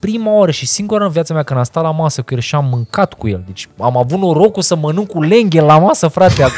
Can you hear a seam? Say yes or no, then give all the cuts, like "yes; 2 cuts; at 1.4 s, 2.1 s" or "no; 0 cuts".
no; 0 cuts